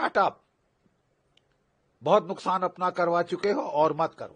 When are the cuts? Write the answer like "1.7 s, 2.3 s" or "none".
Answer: none